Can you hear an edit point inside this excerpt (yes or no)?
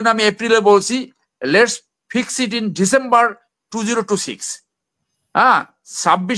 no